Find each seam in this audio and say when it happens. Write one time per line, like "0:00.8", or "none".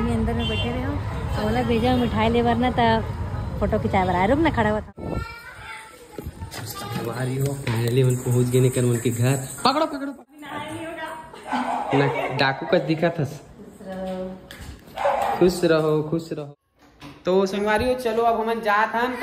0:04.8
0:10.1
0:16.3